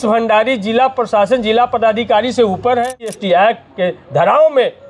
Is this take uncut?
no; 1 cut; at 3.2 s

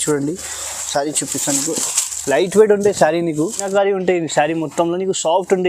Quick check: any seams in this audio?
yes; 1 cut; at 3.6 s

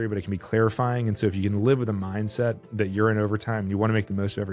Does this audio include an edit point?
no; 0 cuts

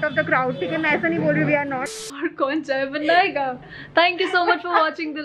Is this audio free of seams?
no; 1 cut; at 2.0 s

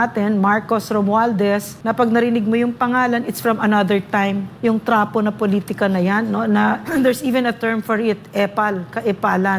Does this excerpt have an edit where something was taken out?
yes; 3 cuts; at 1.7 s, 4.5 s, 6.9 s

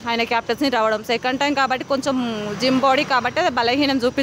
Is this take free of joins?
yes; 0 cuts

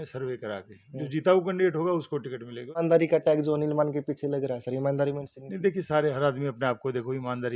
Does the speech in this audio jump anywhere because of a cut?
yes; 1 cut; at 2.6 s

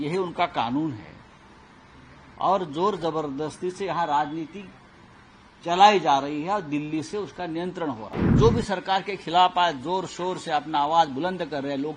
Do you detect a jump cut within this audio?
yes; 1 cut; at 8.3 s

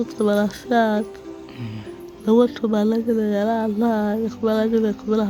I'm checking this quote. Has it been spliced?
no; 0 cuts

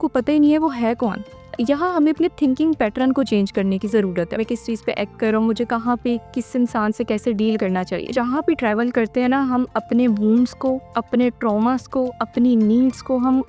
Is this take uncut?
no; 3 cuts; at 1.5 s, 4.4 s, 8.1 s

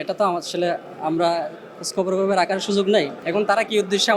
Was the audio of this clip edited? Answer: yes; 1 cut; at 3.2 s

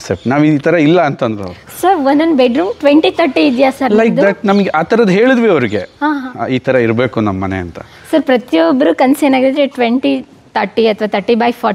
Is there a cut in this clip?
no; 0 cuts

